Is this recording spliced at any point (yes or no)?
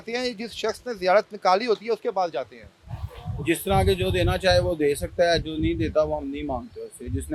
no